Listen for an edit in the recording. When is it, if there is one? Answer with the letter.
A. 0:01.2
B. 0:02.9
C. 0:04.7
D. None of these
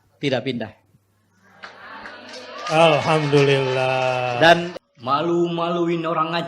C